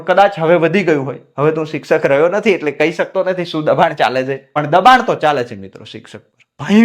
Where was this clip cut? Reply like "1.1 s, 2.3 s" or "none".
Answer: 4.6 s